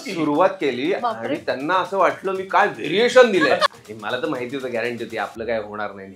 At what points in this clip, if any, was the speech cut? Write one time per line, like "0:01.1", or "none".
0:03.8